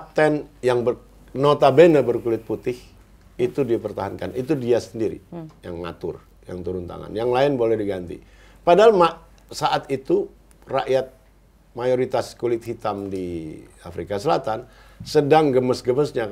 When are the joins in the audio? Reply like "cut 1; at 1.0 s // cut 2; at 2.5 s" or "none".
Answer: none